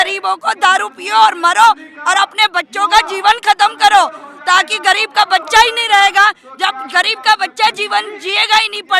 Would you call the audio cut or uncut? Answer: uncut